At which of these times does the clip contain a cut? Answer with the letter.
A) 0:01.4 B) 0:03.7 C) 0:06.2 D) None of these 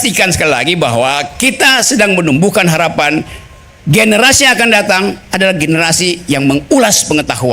D